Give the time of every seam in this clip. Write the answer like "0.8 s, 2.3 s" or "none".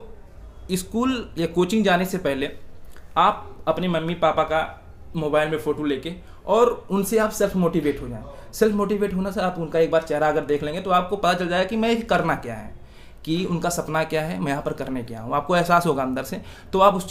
none